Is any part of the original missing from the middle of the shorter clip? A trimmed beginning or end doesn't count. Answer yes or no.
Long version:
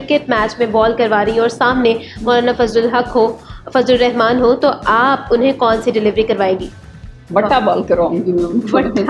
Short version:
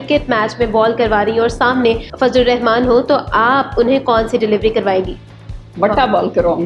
yes